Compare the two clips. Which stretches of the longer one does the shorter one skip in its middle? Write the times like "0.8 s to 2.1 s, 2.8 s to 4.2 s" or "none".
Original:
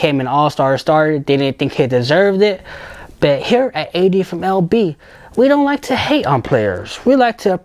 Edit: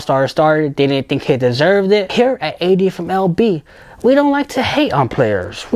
2.6 s to 3.4 s